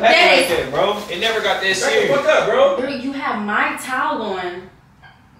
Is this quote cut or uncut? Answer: cut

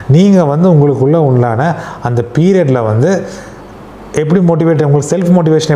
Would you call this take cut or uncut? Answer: uncut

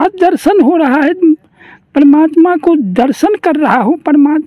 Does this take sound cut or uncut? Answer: uncut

